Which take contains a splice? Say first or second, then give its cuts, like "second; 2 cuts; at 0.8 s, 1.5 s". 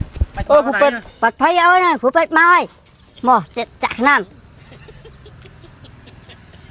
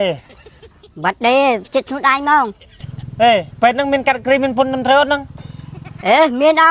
first; 1 cut; at 1.1 s